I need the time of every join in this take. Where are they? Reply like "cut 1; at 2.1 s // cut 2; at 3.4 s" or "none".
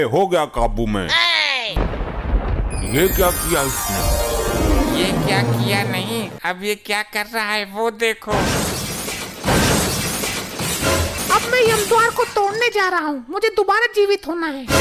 cut 1; at 1.8 s // cut 2; at 11.1 s